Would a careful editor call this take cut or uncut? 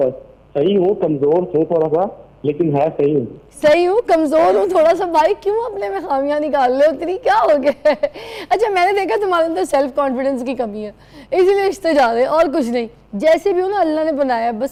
uncut